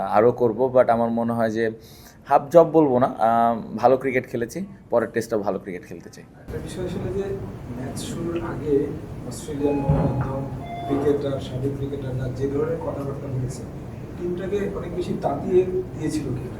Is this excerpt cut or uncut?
uncut